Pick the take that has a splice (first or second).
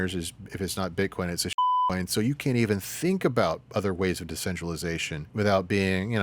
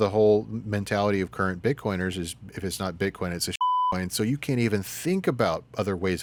first